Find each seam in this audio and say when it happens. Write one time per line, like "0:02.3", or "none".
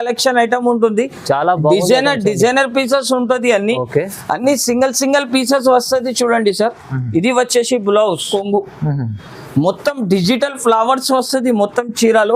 0:08.3